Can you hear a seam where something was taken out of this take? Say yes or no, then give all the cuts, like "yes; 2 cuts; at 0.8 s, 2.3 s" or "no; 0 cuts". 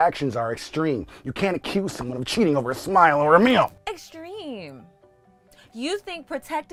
no; 0 cuts